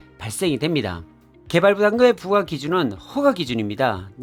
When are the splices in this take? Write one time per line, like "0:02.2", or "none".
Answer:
none

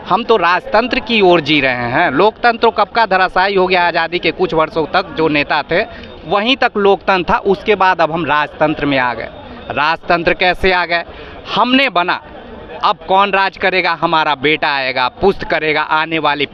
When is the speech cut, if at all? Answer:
none

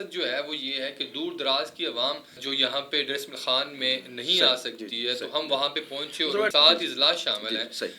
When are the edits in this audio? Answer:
0:02.4
0:06.5

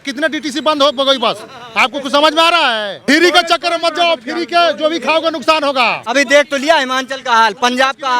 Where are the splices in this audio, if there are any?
0:03.0
0:06.1

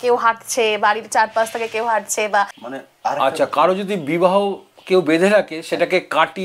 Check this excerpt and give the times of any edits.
0:02.6

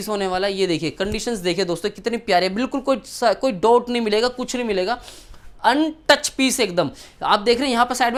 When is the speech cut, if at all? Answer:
none

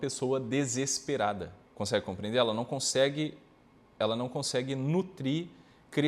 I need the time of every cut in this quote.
0:01.6

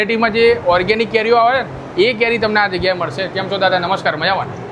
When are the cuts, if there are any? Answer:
none

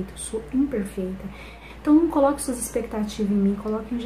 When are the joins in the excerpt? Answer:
0:01.6

